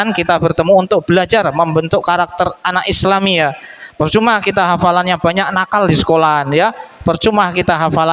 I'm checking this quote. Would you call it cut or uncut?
uncut